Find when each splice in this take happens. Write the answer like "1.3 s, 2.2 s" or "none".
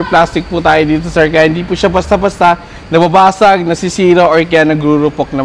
none

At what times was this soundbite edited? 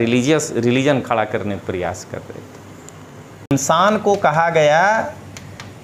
3.5 s

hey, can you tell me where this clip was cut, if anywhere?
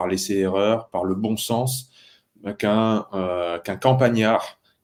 none

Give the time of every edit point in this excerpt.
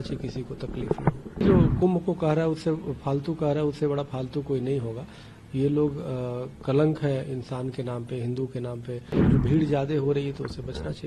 1.4 s, 9.1 s

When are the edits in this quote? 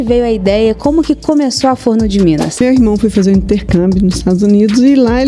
2.6 s

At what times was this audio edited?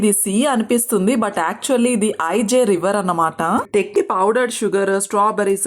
3.9 s

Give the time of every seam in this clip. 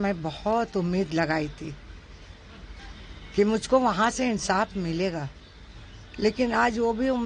none

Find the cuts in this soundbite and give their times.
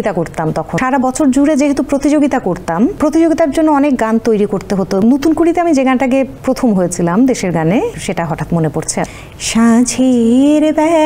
0.7 s, 3.0 s, 5.0 s, 6.4 s, 8.0 s, 9.1 s

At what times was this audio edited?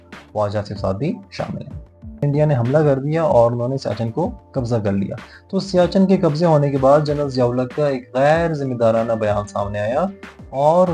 2.2 s

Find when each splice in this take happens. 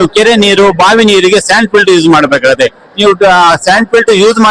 none

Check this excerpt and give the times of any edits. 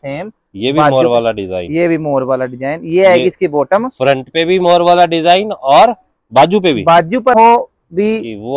7.3 s

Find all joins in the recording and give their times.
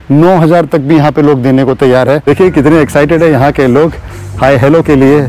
2.2 s

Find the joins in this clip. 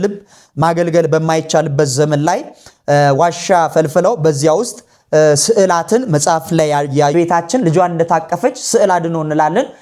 7.1 s

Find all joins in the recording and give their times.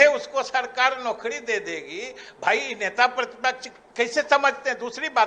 none

